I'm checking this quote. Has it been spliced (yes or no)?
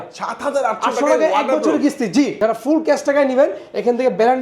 yes